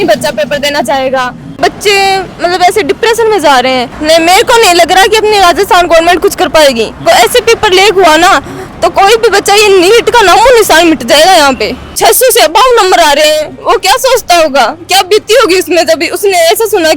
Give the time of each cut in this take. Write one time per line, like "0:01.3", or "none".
0:01.5
0:03.9
0:07.0
0:11.9

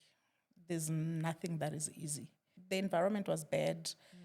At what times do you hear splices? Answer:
0:02.5

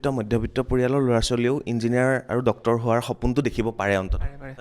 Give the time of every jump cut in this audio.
none

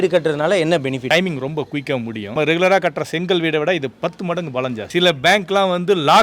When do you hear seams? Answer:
0:01.1
0:02.3
0:04.9

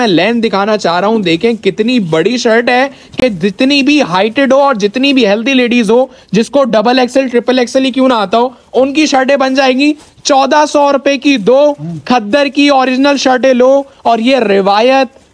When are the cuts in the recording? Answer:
none

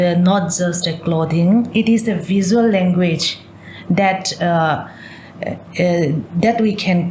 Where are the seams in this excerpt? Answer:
0:01.7

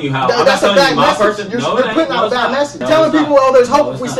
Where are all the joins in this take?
0:02.8

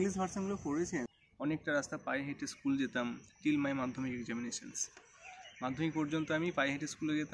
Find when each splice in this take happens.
0:01.2

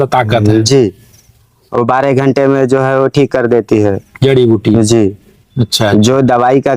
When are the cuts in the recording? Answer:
none

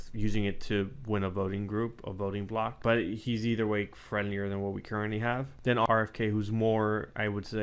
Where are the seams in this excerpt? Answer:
0:02.8
0:05.7

